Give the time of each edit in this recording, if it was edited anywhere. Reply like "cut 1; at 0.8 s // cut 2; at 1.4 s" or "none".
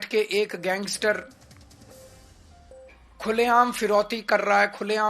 none